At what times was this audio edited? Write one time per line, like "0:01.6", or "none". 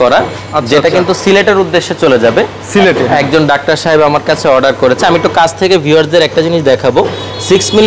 none